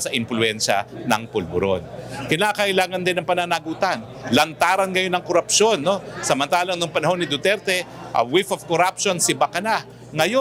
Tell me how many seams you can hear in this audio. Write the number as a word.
zero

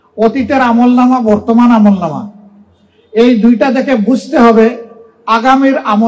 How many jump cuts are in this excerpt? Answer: zero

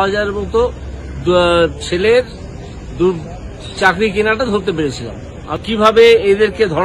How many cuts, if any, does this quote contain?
one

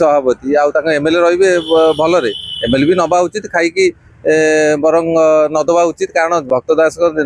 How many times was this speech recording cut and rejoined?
zero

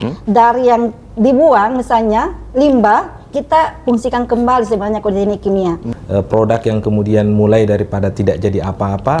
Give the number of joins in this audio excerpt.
one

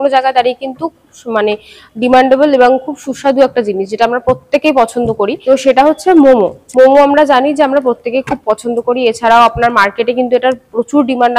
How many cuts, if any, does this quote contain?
zero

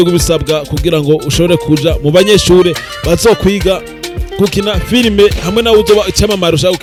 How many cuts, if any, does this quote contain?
zero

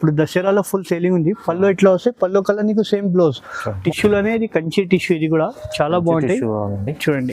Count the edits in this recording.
one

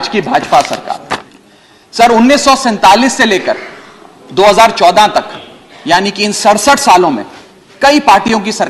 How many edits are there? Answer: one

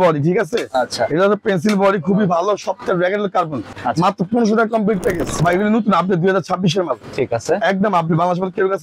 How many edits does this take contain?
two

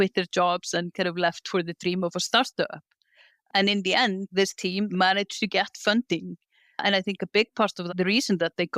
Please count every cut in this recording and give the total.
one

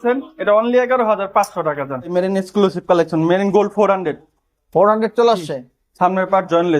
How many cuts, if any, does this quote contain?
one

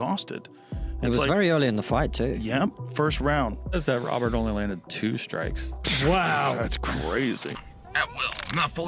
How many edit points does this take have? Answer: one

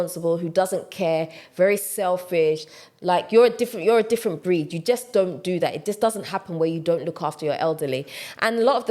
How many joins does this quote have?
zero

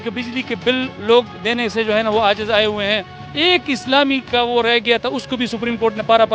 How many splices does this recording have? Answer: one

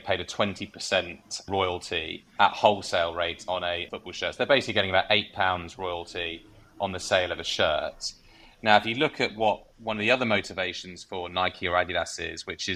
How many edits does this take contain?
two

